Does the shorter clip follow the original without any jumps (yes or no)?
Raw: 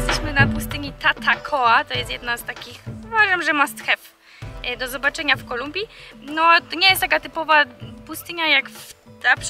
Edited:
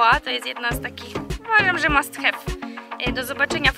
yes